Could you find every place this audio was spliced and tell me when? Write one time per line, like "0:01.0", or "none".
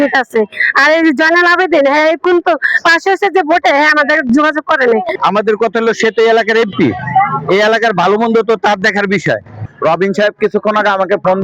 0:05.1
0:09.5